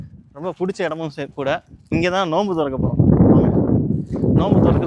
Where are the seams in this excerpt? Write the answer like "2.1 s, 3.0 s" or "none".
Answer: 1.8 s